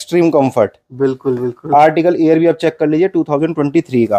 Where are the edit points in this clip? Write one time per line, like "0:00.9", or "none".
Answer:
none